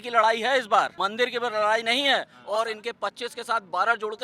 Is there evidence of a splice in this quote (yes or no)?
yes